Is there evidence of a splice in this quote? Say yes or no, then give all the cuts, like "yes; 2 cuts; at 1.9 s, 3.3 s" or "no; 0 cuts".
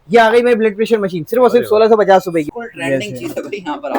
yes; 1 cut; at 2.5 s